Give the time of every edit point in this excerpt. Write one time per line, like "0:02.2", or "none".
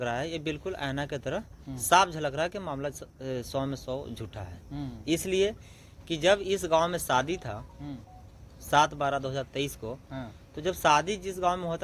none